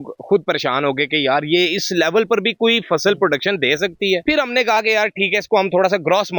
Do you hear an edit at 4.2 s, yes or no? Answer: no